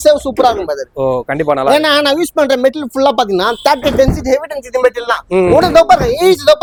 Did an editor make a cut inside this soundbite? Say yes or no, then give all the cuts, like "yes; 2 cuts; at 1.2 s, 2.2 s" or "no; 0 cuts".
no; 0 cuts